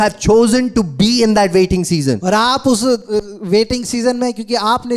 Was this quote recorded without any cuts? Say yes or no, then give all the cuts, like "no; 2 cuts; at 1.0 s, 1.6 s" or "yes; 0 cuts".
yes; 0 cuts